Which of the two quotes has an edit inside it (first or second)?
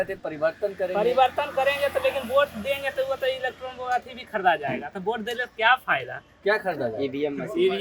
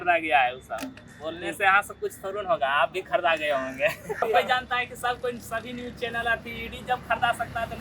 second